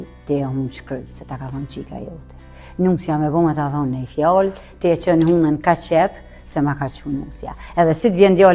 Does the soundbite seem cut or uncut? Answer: uncut